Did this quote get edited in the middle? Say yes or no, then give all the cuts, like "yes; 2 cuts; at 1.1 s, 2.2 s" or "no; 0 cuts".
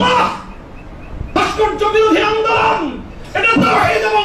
yes; 1 cut; at 1.2 s